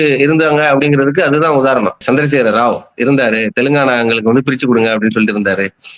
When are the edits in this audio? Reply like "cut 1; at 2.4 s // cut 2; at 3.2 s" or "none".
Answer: none